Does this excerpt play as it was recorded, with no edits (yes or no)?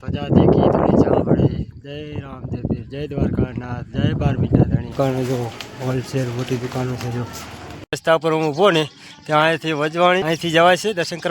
no